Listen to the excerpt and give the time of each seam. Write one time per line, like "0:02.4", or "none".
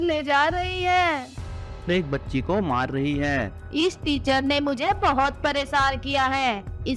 0:01.9
0:03.6